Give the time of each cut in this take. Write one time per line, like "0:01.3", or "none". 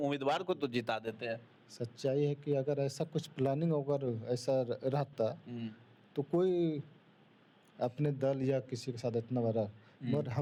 none